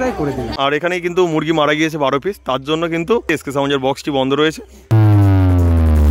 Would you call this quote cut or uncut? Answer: cut